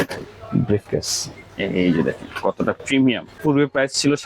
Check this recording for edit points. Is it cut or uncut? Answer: cut